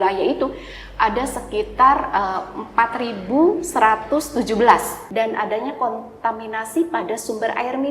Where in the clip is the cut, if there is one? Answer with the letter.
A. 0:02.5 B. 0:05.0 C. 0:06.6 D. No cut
B